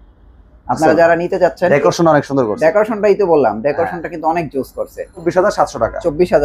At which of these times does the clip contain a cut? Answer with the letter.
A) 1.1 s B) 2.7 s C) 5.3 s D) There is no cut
C